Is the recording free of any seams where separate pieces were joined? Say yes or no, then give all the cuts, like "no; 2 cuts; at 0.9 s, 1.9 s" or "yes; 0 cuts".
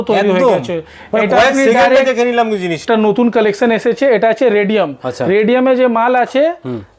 no; 1 cut; at 2.8 s